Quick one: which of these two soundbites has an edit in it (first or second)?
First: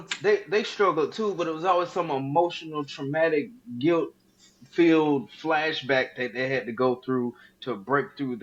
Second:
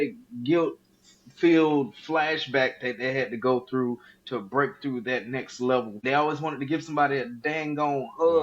second